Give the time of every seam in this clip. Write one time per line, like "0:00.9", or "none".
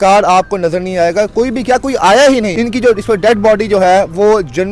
0:02.5